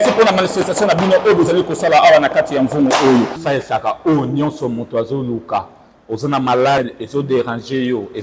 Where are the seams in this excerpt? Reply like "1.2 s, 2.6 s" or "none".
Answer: 3.4 s